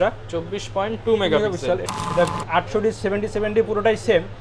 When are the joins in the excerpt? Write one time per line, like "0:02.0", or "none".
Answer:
0:01.8